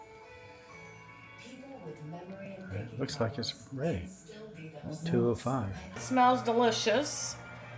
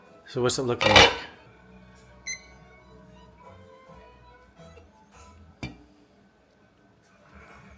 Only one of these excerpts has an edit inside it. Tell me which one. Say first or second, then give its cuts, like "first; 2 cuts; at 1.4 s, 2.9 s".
first; 1 cut; at 6.0 s